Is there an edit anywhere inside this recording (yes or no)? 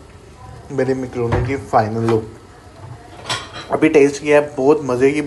no